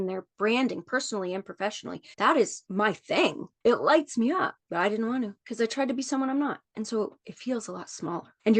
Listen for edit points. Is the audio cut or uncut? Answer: cut